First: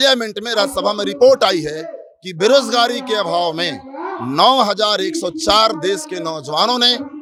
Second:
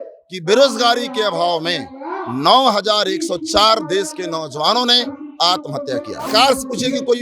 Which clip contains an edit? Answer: second; 1 cut; at 6.2 s

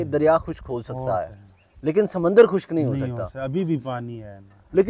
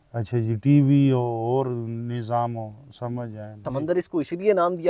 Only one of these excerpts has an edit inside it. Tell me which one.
second; 1 cut; at 3.6 s

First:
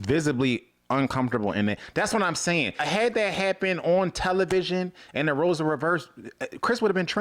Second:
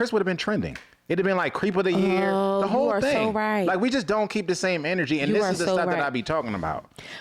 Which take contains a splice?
first; 1 cut; at 2.8 s

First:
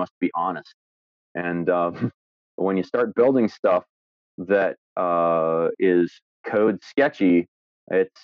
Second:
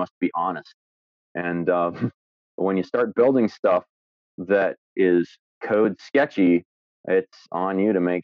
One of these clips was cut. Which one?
second; 1 cut; at 4.9 s

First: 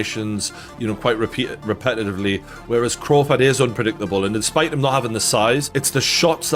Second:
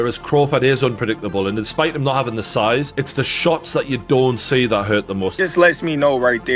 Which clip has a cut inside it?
second; 1 cut; at 5.4 s

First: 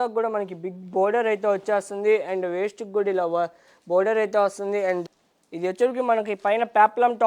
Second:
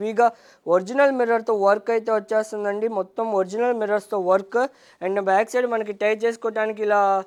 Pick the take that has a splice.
first; 1 cut; at 5.1 s

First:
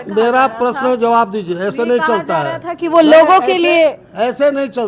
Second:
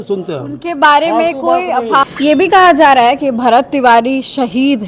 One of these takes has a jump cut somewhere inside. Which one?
second; 1 cut; at 2.0 s

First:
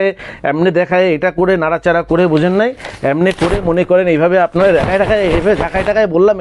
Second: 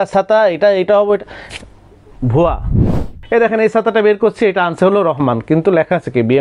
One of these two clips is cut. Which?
second; 1 cut; at 3.0 s

